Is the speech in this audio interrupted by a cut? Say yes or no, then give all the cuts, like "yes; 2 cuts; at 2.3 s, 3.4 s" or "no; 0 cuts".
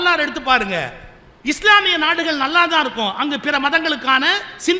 no; 0 cuts